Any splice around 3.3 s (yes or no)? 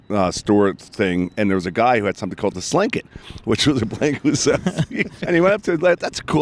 no